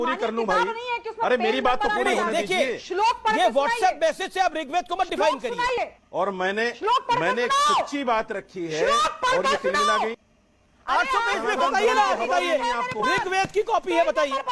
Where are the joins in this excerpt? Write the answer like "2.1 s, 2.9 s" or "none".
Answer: 6.0 s, 10.1 s